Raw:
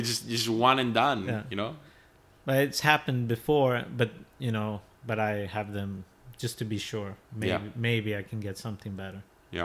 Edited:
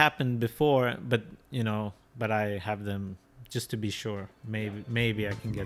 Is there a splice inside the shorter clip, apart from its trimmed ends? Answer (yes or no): no